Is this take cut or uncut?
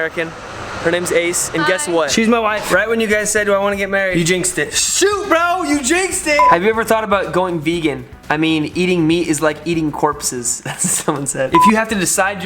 cut